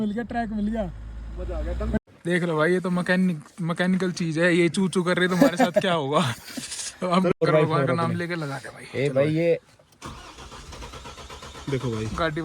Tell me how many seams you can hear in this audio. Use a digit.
2